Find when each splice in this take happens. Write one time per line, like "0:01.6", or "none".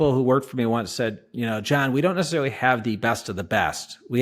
none